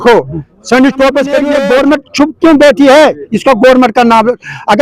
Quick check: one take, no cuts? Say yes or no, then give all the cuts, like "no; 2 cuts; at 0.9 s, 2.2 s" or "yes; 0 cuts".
no; 1 cut; at 1.5 s